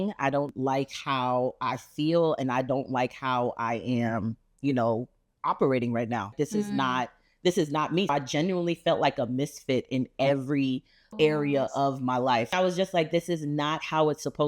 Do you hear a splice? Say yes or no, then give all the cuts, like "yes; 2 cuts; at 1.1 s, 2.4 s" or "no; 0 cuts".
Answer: yes; 4 cuts; at 6.3 s, 8.1 s, 11.1 s, 12.5 s